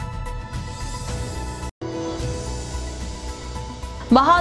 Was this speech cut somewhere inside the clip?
yes; 1 cut; at 1.7 s

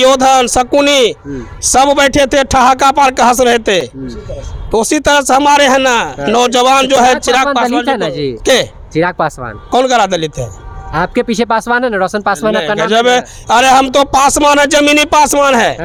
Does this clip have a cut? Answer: no; 0 cuts

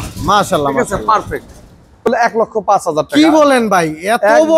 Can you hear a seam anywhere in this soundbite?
yes; 1 cut; at 2.0 s

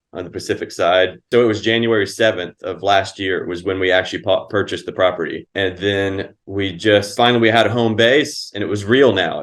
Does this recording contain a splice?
yes; 4 cuts; at 1.3 s, 5.4 s, 6.3 s, 7.1 s

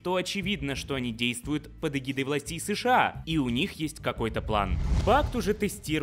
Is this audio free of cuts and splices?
no; 1 cut; at 4.8 s

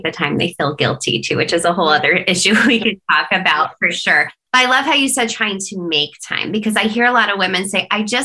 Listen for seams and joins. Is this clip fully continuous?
yes; 0 cuts

